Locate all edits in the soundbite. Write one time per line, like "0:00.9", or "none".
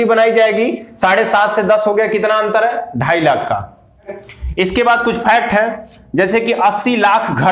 0:04.1